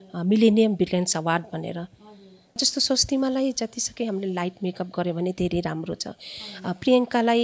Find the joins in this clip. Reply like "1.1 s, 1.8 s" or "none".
2.6 s